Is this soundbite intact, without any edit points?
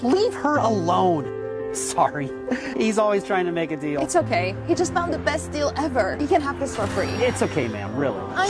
yes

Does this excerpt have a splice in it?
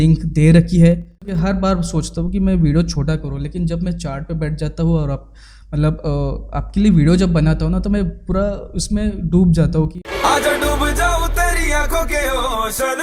yes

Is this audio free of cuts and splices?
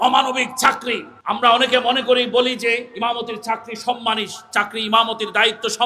no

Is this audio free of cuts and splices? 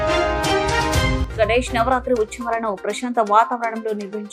yes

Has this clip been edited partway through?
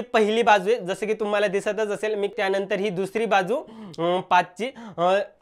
yes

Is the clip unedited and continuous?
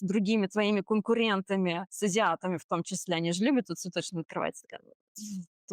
no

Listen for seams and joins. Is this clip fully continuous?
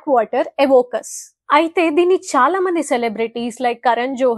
yes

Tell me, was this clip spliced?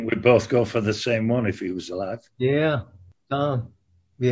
yes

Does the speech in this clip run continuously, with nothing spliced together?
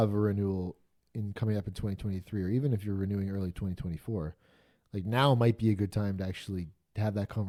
yes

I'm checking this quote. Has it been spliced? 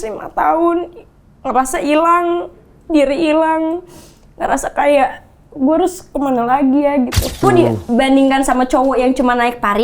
yes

